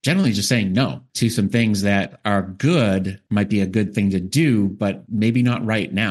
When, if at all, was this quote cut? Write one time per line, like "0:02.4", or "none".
0:01.0
0:03.2
0:05.0